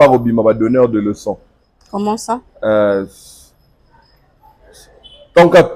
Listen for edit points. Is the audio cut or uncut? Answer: uncut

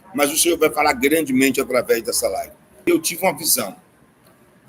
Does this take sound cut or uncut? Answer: cut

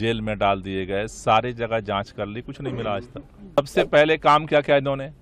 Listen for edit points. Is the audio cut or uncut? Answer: cut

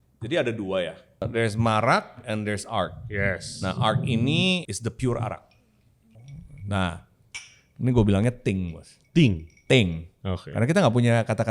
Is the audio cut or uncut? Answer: cut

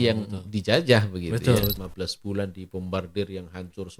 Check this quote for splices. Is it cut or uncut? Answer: cut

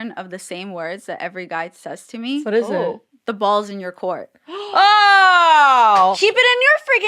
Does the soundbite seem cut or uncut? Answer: cut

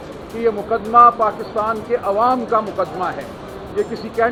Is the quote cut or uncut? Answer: uncut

